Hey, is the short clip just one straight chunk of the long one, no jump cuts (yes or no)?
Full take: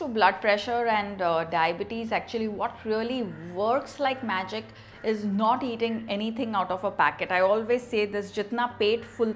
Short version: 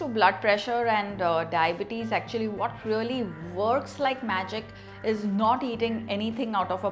yes